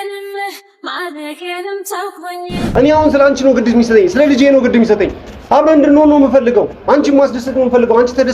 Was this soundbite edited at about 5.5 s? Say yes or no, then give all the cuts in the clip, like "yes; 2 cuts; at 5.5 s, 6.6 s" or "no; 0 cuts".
no; 1 cut; at 2.7 s